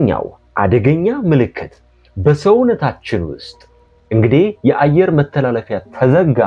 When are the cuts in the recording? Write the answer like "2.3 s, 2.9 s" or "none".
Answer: none